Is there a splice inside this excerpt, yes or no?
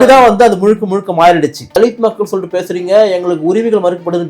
yes